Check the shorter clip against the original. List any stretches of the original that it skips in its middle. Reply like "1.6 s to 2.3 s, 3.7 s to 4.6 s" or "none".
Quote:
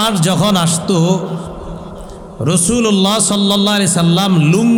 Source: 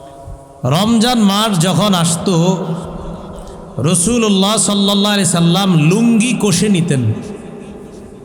none